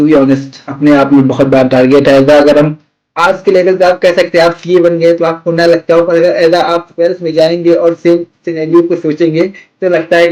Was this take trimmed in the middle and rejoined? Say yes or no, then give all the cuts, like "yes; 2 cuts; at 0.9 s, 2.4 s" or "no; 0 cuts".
no; 0 cuts